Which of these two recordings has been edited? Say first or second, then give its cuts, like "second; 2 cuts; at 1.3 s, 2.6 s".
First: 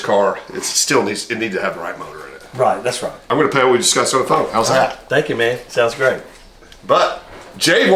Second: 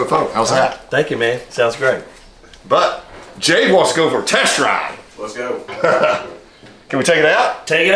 first; 1 cut; at 3.2 s